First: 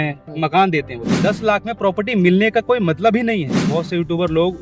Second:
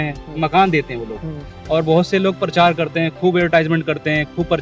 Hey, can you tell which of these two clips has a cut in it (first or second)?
first